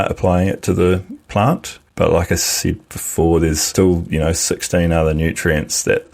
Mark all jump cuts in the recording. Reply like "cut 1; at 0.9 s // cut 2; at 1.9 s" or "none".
cut 1; at 1.8 s // cut 2; at 3.7 s